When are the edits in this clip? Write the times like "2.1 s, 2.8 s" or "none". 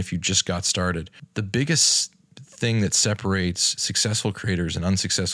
1.2 s